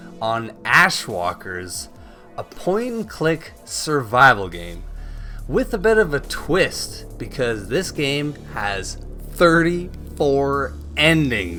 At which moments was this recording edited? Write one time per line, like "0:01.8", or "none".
none